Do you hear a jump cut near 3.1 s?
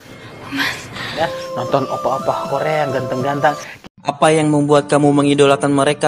no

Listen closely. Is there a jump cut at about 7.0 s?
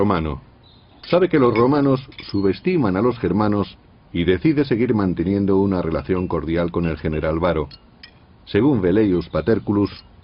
yes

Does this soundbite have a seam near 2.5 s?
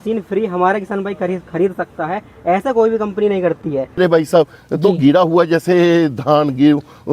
no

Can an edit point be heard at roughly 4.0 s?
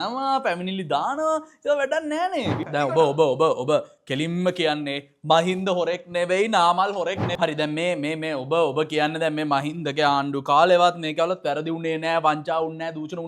no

